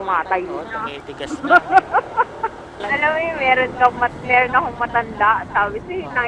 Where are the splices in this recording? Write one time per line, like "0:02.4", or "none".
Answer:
0:02.7